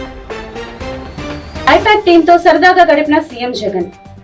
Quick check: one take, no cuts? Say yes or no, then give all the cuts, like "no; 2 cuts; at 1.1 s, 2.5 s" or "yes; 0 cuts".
no; 1 cut; at 1.3 s